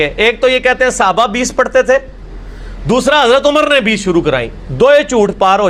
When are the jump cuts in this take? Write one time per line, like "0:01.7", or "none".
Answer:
none